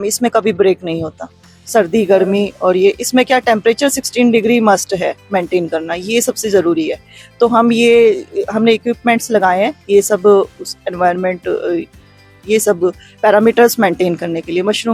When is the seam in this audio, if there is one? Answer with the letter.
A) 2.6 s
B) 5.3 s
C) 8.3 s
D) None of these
D